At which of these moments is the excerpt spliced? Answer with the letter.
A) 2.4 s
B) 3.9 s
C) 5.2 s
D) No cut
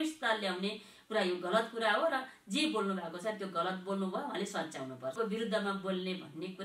C